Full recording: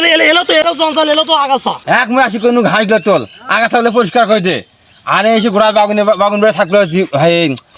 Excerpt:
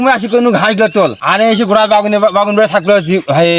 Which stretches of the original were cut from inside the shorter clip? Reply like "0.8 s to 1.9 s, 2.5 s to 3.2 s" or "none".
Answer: 3.3 s to 5.0 s